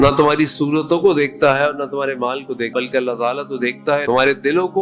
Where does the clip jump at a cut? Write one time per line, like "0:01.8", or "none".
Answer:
0:02.7
0:04.0